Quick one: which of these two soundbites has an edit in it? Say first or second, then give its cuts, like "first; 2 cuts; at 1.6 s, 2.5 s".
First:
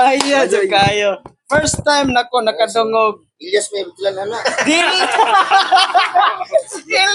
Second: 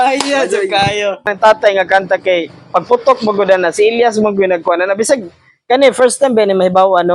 second; 1 cut; at 1.3 s